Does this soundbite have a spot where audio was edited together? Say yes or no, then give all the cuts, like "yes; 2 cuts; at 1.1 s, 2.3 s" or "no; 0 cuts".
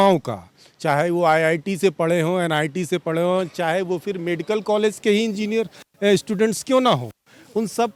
no; 0 cuts